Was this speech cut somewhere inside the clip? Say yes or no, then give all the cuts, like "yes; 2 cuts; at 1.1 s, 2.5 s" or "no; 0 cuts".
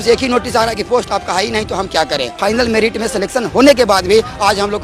yes; 1 cut; at 2.4 s